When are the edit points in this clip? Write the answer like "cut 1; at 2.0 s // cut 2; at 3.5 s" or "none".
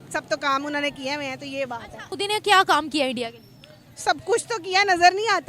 cut 1; at 2.1 s